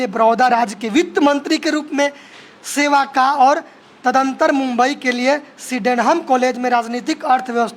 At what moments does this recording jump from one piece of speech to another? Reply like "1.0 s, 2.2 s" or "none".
none